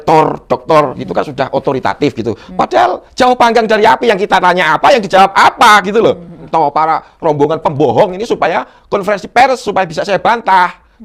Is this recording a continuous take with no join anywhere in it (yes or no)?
no